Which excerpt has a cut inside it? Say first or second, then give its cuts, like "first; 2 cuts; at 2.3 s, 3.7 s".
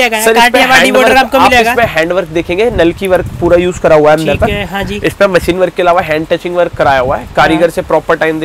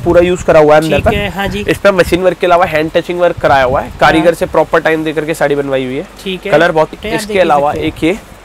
second; 1 cut; at 6.9 s